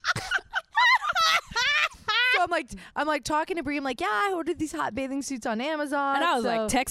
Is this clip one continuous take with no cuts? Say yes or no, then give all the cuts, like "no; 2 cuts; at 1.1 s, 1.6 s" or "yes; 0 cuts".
yes; 0 cuts